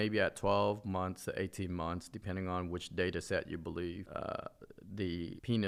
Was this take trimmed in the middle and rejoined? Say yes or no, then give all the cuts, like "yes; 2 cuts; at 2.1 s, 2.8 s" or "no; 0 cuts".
no; 0 cuts